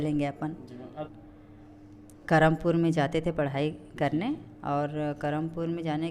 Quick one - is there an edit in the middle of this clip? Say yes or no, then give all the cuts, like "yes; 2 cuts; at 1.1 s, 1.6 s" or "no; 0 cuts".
yes; 1 cut; at 1.1 s